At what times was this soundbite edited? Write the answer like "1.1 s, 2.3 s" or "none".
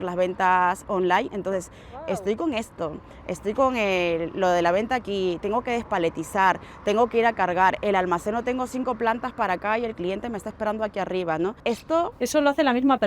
11.6 s